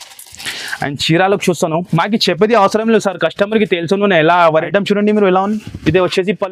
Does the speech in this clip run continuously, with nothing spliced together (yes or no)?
no